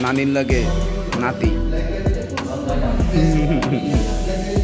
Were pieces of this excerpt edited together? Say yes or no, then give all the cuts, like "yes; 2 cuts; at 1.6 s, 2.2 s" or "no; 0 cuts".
no; 0 cuts